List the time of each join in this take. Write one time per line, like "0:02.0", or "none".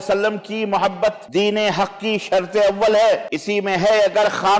0:01.2
0:03.3